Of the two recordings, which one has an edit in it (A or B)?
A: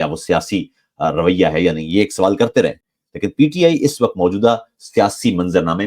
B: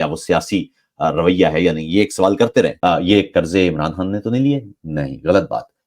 B